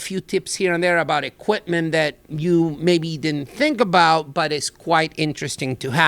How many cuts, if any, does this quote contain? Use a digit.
0